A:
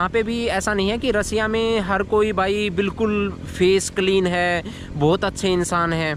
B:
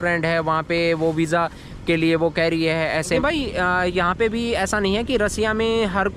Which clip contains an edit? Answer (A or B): B